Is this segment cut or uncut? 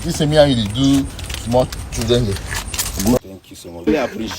cut